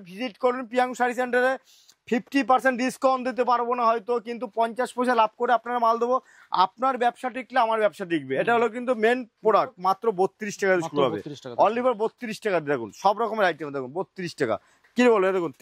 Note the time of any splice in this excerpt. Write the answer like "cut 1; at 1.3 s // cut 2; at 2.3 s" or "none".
cut 1; at 9.8 s

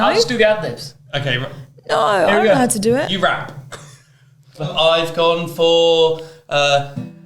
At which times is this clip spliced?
cut 1; at 4.7 s

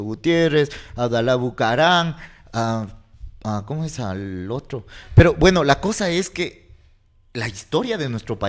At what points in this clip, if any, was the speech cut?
none

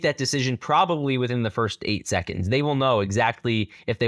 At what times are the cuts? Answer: none

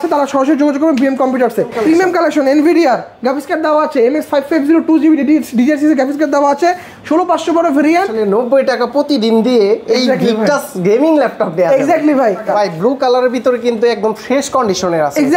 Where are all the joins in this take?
cut 1; at 1.7 s // cut 2; at 8.1 s // cut 3; at 12.4 s

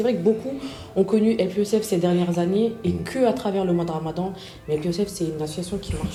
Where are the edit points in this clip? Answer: none

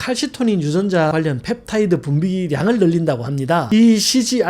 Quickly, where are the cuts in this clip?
cut 1; at 1.1 s // cut 2; at 3.6 s

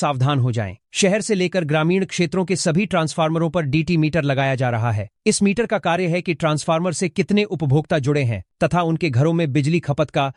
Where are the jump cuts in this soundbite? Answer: none

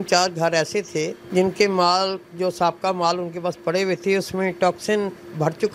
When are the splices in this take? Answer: cut 1; at 1.2 s

